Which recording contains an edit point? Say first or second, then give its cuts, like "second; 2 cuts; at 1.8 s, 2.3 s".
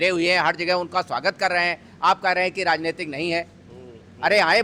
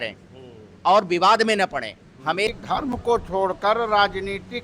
second; 1 cut; at 2.5 s